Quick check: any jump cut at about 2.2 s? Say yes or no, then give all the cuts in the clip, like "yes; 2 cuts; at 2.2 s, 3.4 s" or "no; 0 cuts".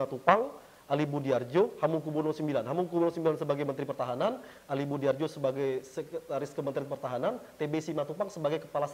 no; 0 cuts